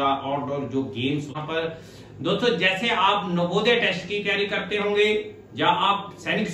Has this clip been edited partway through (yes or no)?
yes